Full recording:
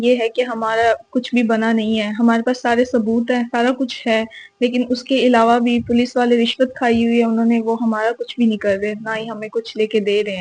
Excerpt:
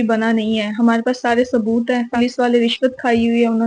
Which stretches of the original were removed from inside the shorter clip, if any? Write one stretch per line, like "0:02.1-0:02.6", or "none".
0:03.5-0:05.9